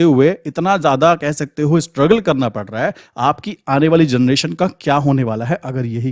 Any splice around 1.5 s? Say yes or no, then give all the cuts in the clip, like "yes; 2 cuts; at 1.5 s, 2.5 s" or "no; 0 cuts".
no; 0 cuts